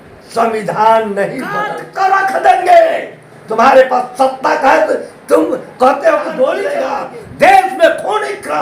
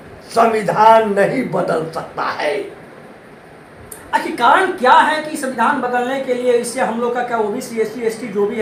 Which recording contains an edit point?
first; 2 cuts; at 1.8 s, 6.7 s

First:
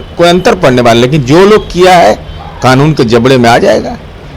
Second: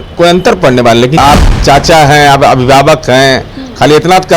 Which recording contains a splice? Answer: second; 1 cut; at 1.2 s

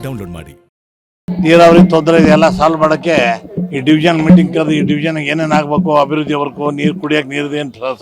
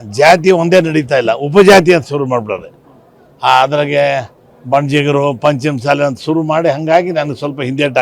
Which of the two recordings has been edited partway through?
first; 1 cut; at 1.3 s

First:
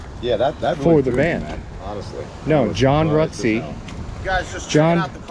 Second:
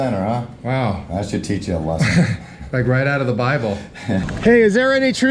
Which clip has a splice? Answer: second; 1 cut; at 4.2 s

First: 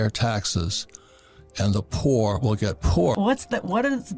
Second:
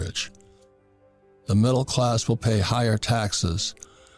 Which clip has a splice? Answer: first; 1 cut; at 3.2 s

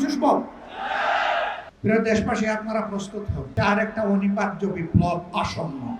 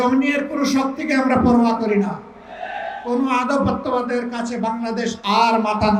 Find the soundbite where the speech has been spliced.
first; 2 cuts; at 1.7 s, 3.5 s

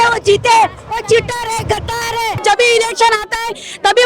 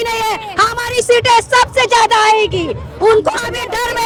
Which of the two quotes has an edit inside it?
first; 1 cut; at 2.4 s

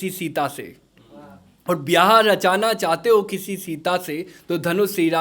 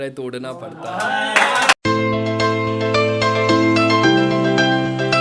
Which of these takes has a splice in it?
second; 1 cut; at 1.8 s

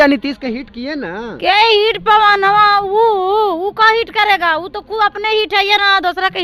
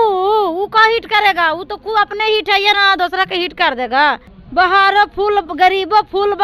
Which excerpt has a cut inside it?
second; 1 cut; at 4.3 s

